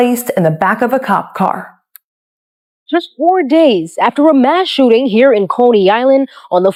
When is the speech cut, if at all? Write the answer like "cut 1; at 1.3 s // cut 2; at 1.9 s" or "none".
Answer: none